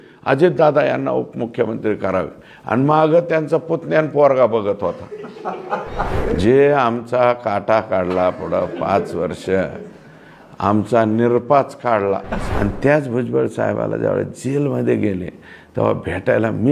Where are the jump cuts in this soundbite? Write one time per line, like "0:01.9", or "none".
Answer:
0:06.1
0:12.3